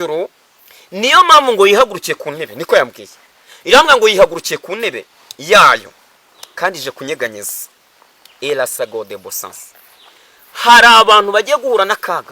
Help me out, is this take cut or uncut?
uncut